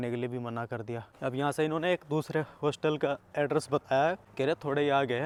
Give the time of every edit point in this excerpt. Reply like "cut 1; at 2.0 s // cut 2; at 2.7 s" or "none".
none